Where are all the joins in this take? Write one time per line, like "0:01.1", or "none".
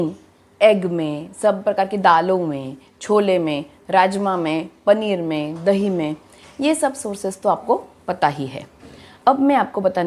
none